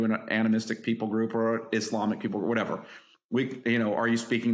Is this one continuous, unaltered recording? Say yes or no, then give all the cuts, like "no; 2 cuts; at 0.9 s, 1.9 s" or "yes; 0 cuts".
yes; 0 cuts